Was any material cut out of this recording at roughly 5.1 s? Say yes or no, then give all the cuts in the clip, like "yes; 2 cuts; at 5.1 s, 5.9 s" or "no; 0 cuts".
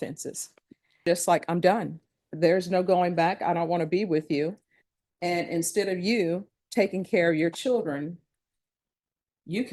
no; 1 cut; at 0.9 s